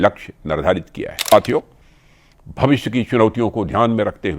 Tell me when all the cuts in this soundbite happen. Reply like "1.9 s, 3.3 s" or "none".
1.3 s

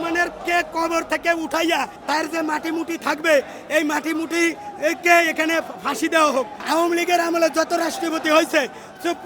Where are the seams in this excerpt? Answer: 2.0 s, 6.6 s

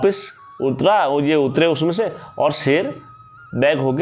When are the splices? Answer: none

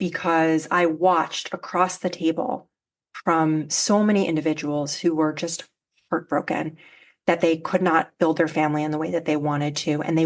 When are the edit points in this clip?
none

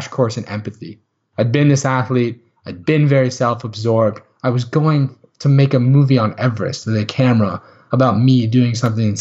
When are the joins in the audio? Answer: 1.2 s

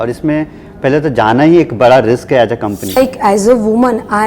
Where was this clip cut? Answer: 3.0 s

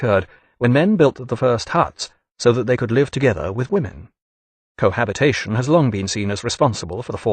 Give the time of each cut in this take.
none

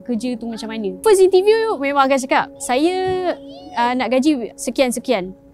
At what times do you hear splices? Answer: 0.9 s, 2.6 s, 4.5 s

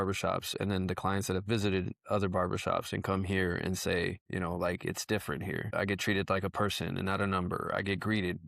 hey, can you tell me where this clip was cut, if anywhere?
none

